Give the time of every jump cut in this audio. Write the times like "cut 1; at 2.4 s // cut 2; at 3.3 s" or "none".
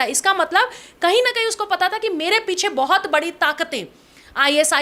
none